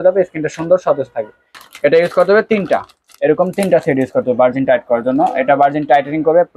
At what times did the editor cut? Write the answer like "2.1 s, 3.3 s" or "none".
1.5 s

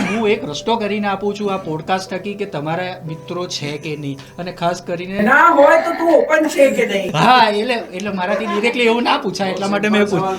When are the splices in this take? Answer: none

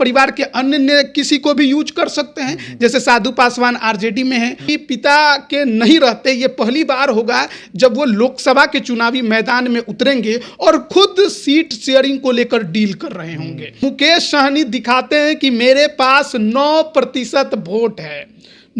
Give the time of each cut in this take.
4.7 s, 13.8 s

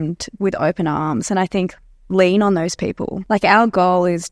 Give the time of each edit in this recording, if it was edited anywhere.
3.2 s

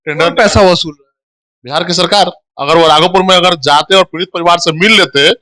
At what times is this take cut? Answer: 2.5 s

